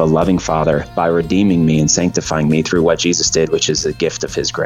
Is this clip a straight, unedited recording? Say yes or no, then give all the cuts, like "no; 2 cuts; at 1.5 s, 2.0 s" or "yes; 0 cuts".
no; 1 cut; at 0.9 s